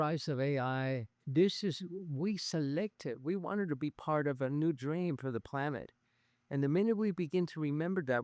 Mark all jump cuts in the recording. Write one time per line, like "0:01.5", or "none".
0:01.2